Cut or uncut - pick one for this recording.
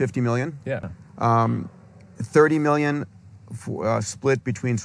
cut